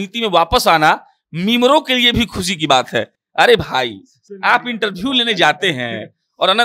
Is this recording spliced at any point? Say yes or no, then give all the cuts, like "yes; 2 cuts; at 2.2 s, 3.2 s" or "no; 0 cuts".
no; 0 cuts